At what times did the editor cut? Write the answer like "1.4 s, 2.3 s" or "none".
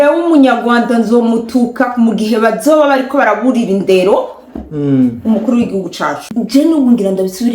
6.3 s

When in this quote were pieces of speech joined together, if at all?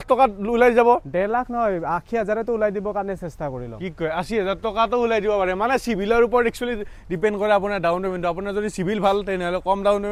none

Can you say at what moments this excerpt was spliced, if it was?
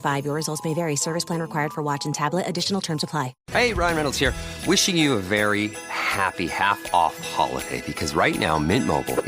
3.4 s

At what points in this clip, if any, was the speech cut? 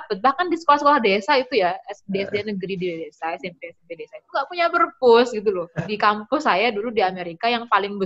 5.8 s

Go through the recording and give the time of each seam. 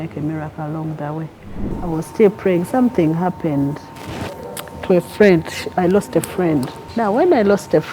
1.7 s, 6.8 s

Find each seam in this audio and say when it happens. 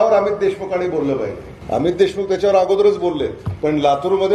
1.5 s, 3.4 s

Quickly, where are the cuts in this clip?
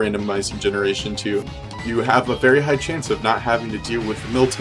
1.6 s

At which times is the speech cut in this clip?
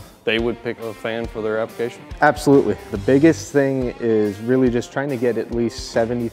0.8 s, 2.9 s

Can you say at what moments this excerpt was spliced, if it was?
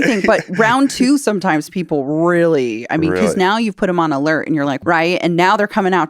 4.8 s

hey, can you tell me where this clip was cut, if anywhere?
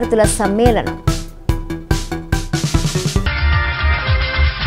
3.6 s

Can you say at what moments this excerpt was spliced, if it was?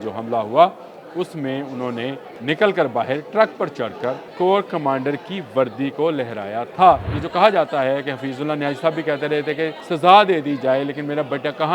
2.3 s, 4.2 s, 7.2 s, 9.8 s

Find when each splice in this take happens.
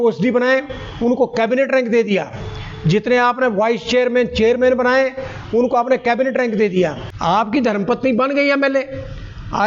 7.1 s

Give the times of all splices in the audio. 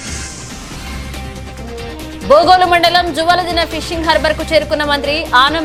none

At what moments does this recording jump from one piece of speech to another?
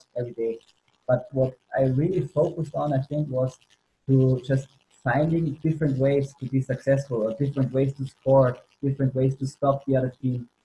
none

